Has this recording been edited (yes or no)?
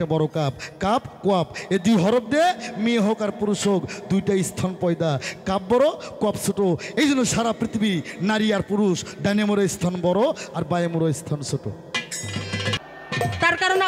yes